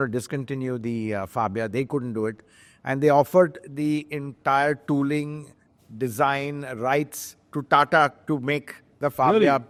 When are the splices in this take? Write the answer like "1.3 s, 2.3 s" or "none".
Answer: none